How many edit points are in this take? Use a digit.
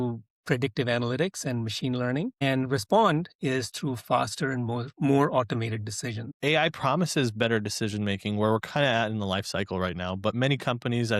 1